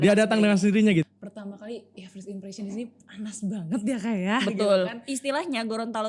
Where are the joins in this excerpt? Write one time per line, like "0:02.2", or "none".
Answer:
0:01.1